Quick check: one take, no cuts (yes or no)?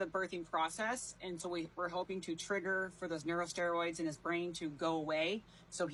yes